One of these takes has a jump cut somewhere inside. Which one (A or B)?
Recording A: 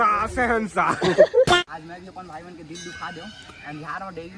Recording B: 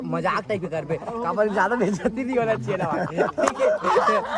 A